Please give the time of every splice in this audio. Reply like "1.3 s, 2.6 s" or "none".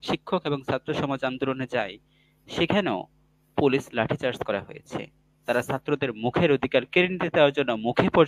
none